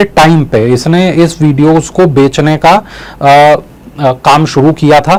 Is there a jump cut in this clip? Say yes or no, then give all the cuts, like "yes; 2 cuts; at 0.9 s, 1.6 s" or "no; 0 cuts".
no; 0 cuts